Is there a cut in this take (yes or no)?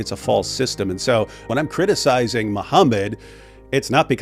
yes